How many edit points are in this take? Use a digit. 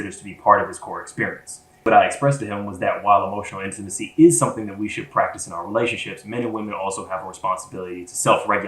1